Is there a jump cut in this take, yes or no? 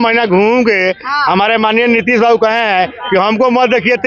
no